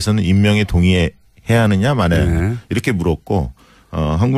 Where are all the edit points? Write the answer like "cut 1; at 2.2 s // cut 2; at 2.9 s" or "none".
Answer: cut 1; at 3.0 s